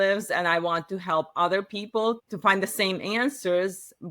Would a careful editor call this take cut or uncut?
cut